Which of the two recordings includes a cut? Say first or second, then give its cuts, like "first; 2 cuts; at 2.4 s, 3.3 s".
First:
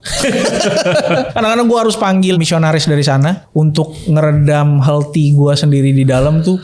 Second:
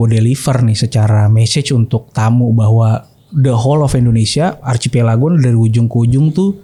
first; 3 cuts; at 1.3 s, 2.4 s, 3.4 s